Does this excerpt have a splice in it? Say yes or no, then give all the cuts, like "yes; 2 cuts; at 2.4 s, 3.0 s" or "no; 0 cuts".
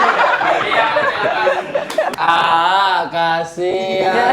yes; 1 cut; at 2.1 s